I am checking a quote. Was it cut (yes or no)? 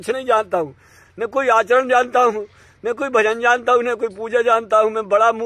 no